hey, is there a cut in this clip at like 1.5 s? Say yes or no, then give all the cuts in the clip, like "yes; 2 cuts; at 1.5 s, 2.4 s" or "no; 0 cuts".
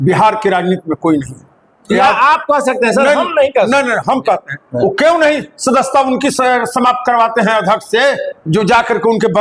no; 0 cuts